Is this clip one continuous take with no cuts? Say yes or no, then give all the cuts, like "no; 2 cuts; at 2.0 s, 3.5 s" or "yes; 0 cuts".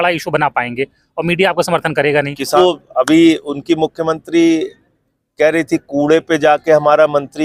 no; 1 cut; at 2.6 s